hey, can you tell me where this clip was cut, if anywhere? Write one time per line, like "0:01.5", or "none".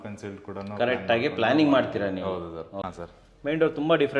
0:02.9